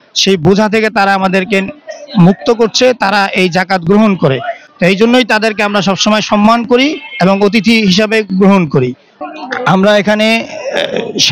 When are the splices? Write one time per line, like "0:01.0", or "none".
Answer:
none